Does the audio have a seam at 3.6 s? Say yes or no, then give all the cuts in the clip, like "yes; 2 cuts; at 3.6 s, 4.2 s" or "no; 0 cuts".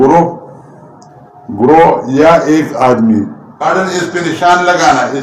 yes; 1 cut; at 3.6 s